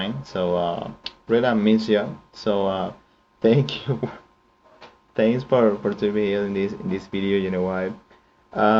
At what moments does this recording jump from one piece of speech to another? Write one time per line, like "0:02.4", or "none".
none